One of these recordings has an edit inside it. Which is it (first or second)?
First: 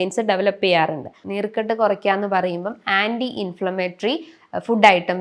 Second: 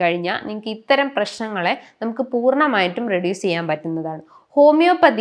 first